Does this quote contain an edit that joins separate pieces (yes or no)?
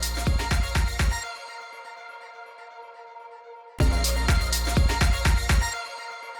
yes